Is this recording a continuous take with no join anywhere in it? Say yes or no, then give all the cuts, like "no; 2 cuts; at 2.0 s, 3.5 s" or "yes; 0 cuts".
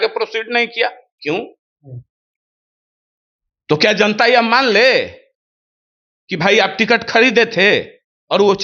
yes; 0 cuts